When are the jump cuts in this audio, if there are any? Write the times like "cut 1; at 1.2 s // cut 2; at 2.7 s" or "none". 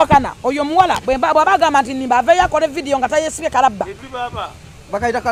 none